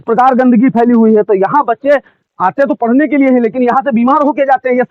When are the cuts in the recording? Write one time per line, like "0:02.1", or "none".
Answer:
none